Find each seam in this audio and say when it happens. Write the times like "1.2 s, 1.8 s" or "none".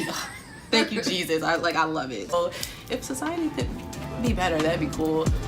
2.3 s